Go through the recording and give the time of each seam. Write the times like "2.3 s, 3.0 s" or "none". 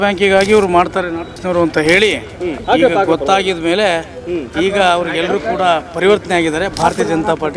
1.3 s, 2.5 s